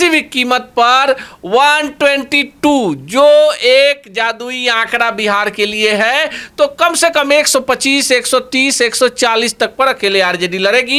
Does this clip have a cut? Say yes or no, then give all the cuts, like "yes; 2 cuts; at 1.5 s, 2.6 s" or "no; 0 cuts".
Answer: no; 0 cuts